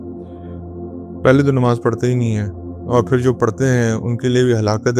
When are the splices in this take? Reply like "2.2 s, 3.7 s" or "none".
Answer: 1.2 s